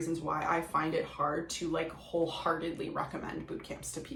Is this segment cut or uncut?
uncut